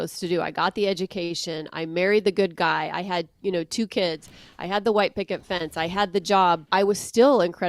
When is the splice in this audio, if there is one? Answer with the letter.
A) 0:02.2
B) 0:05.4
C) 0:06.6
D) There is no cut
C